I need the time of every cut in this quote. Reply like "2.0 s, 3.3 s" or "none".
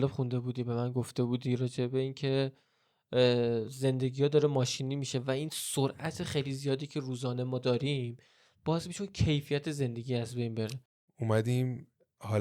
10.8 s